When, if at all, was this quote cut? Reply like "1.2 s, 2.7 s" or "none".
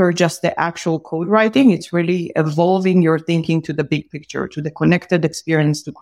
none

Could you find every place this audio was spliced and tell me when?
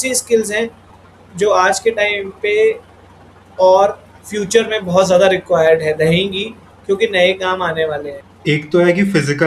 none

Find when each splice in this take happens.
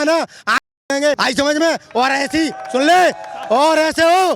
1.2 s

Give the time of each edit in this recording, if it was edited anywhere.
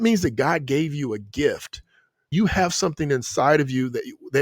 2.3 s

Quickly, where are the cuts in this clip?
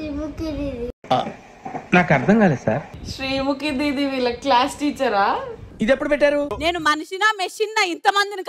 2.9 s, 6.5 s

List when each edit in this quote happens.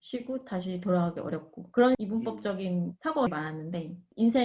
none

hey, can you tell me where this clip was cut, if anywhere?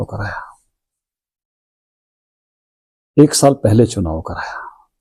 none

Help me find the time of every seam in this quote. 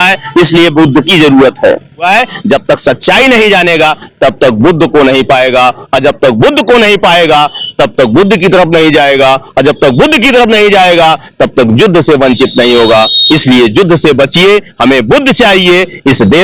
2.1 s

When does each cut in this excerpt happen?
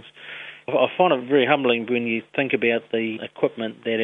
0.7 s, 2.3 s, 3.1 s

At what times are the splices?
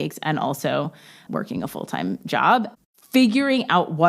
1.2 s

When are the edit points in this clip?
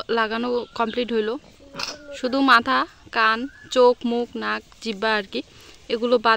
none

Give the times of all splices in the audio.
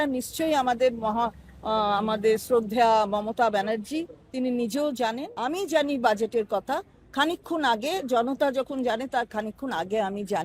5.3 s

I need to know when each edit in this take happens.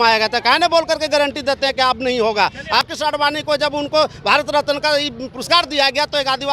2.8 s

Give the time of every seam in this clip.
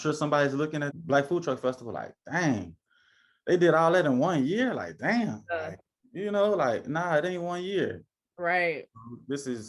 0.9 s

